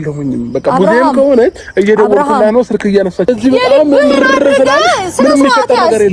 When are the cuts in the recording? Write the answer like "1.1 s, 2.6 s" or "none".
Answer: 3.3 s

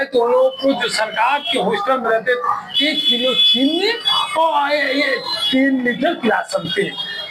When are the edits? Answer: none

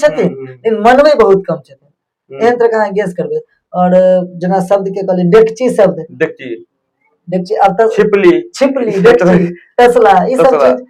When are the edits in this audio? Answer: none

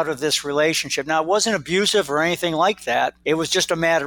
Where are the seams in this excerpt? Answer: 3.2 s

